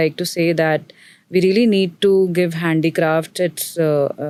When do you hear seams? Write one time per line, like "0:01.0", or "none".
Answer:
none